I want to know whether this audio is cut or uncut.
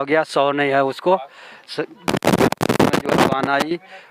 uncut